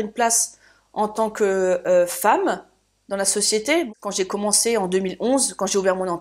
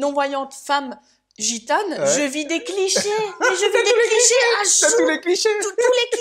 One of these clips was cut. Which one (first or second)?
first